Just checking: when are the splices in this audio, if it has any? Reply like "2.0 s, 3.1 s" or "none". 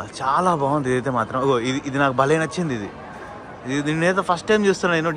none